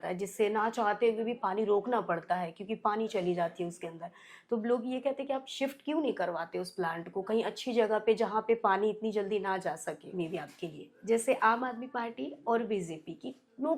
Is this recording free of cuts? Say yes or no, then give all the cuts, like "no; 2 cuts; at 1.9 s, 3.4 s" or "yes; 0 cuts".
no; 1 cut; at 10.0 s